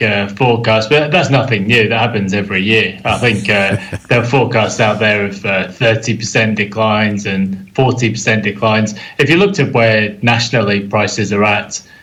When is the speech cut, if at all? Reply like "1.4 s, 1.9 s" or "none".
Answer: none